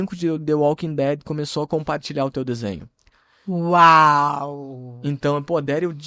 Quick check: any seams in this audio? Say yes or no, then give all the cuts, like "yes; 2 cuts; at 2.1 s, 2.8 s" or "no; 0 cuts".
no; 0 cuts